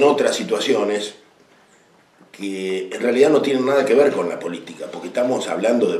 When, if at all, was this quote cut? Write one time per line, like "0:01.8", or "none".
none